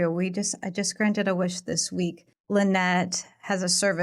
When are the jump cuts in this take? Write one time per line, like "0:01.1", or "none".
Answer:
0:02.3